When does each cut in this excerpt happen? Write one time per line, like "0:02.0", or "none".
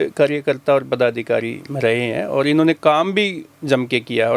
none